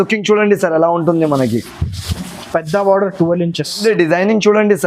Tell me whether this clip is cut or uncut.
cut